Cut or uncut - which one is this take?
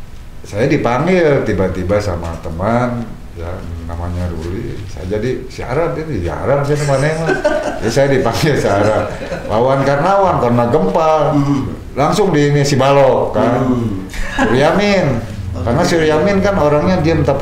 uncut